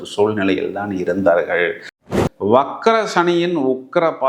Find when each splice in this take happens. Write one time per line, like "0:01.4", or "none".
0:02.0